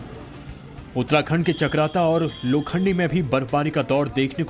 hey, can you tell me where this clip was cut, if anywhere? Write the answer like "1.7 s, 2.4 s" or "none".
3.5 s